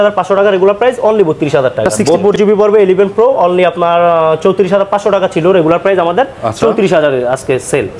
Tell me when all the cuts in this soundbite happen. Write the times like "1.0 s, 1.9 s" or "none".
2.2 s